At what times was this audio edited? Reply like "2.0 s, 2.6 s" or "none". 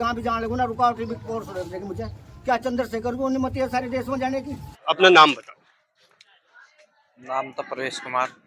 4.7 s